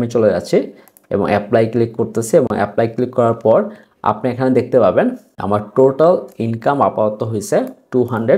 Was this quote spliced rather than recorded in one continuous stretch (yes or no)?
no